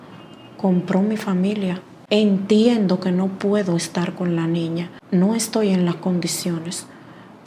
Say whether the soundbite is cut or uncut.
cut